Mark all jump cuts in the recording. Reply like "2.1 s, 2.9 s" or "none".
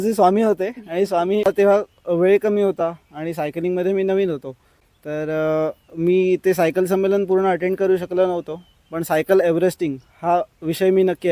1.5 s